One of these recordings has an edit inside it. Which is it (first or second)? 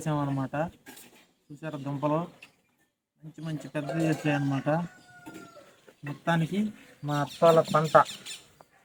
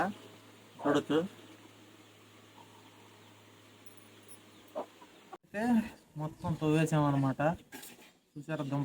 second